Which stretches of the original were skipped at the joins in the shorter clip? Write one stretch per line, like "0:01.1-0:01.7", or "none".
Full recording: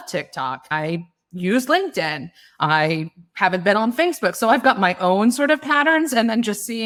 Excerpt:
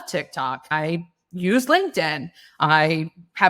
none